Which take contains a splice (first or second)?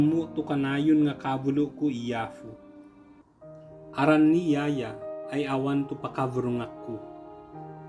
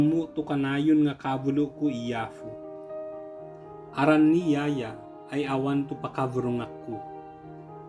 second